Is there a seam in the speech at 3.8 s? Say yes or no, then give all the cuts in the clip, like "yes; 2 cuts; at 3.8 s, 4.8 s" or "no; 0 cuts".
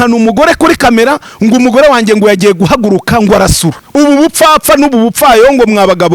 yes; 1 cut; at 3.8 s